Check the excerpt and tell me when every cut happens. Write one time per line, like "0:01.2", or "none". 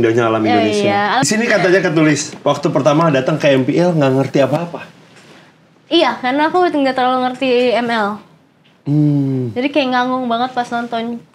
0:01.3